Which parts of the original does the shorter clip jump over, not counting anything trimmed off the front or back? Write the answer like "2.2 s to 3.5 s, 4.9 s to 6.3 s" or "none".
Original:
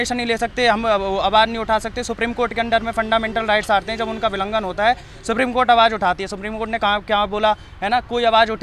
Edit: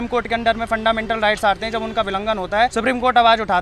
5.0 s to 5.2 s